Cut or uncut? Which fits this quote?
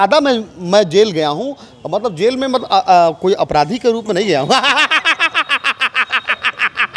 uncut